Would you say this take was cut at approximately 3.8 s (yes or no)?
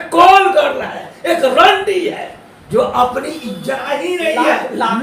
yes